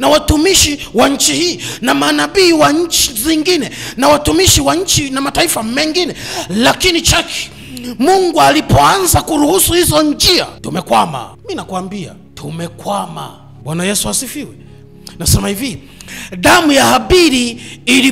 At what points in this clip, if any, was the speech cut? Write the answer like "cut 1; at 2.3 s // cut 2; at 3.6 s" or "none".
cut 1; at 10.6 s // cut 2; at 11.4 s // cut 3; at 12.2 s // cut 4; at 13.4 s